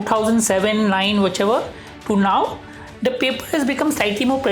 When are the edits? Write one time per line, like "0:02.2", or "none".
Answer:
none